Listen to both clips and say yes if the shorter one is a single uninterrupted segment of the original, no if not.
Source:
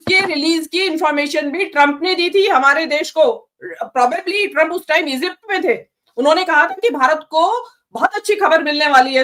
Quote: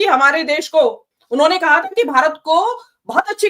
no